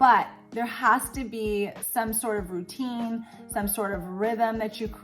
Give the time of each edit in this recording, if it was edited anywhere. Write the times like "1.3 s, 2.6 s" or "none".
none